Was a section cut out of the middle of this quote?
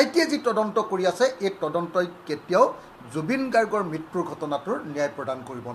no; 0 cuts

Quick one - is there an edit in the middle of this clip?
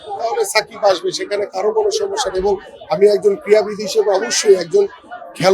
no; 0 cuts

